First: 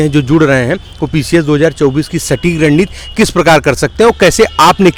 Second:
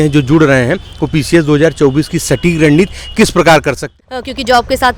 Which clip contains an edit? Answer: second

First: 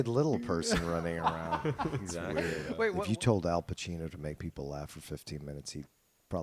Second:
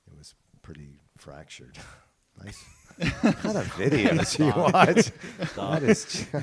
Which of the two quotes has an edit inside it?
first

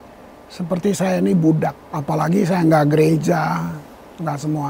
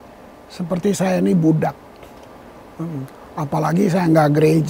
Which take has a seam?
first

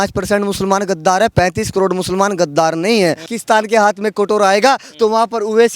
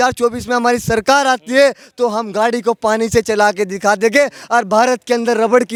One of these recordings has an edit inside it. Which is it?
first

